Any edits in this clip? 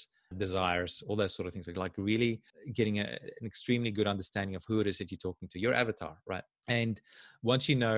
yes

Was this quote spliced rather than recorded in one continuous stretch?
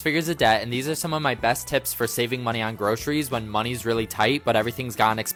no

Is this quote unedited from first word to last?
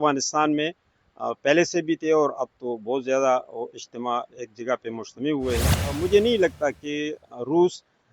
no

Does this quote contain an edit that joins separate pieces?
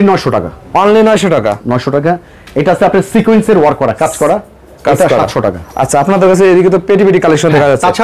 no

